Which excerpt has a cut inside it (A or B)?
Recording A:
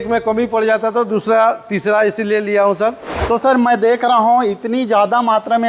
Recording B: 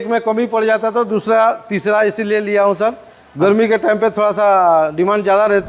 A